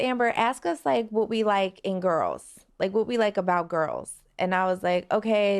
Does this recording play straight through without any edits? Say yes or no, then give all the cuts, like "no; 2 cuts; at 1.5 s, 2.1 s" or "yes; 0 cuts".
yes; 0 cuts